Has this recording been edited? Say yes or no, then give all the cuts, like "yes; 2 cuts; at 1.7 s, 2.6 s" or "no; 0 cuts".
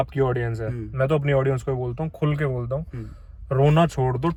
no; 0 cuts